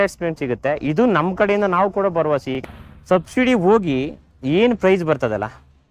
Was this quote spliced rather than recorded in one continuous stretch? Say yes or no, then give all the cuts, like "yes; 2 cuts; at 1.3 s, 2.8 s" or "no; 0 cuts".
yes; 1 cut; at 2.6 s